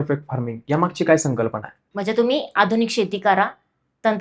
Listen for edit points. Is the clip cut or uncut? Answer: cut